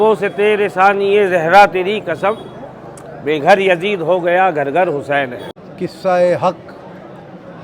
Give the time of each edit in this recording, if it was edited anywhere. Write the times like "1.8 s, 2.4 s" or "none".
5.6 s